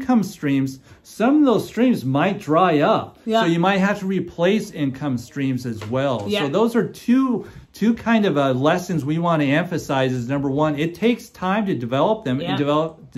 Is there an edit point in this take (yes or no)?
no